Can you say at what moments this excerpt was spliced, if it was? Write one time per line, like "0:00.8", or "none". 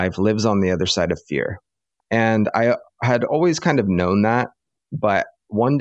0:03.3